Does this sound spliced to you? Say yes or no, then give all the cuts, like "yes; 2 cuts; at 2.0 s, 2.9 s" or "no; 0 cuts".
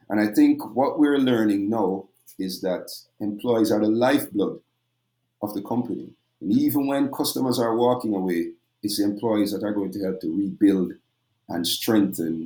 no; 0 cuts